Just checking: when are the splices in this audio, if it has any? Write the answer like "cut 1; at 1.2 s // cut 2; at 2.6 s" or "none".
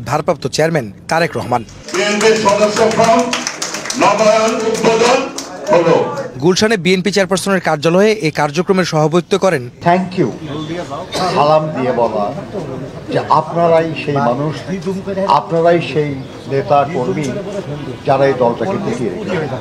cut 1; at 9.7 s